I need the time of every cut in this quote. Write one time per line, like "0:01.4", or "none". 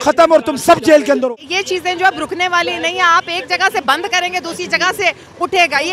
0:01.3